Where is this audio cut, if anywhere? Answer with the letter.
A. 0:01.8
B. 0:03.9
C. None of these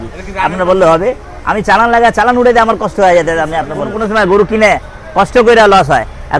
B